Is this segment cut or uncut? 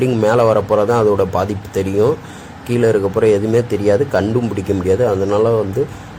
uncut